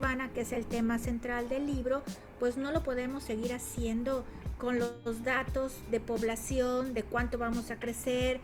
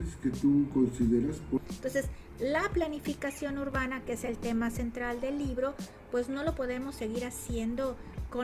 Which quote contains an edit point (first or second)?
second